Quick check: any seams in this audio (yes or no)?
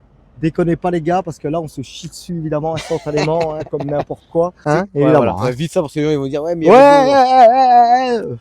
yes